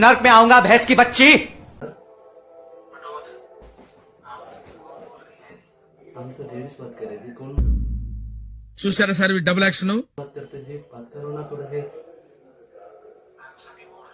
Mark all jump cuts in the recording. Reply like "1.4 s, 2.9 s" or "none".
3.6 s